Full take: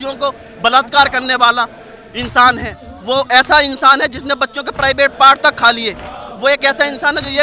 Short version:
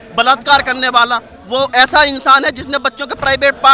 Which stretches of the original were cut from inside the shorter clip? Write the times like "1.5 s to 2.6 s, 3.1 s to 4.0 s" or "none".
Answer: 1.8 s to 2.9 s